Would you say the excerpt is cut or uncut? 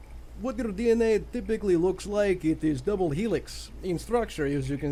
uncut